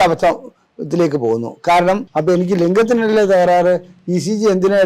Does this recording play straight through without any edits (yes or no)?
no